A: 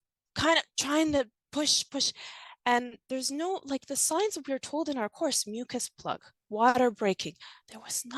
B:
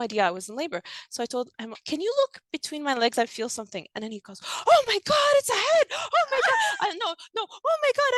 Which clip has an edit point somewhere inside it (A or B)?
B